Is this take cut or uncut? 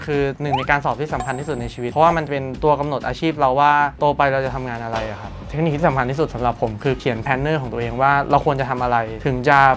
cut